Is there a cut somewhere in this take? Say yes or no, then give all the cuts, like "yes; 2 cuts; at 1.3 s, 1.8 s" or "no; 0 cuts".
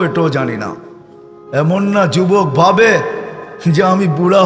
no; 0 cuts